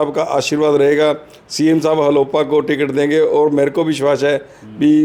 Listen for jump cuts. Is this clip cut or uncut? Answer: uncut